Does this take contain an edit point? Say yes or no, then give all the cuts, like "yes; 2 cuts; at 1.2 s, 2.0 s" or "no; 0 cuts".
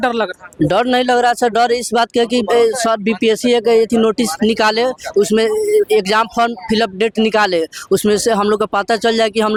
no; 0 cuts